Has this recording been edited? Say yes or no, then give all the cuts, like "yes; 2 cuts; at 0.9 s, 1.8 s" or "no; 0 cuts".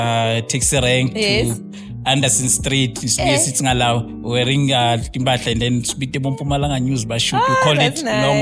no; 0 cuts